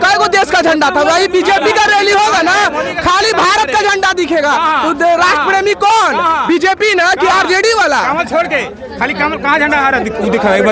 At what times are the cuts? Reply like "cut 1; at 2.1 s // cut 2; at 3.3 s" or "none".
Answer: none